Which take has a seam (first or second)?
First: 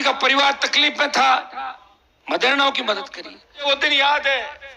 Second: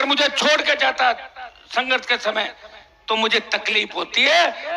first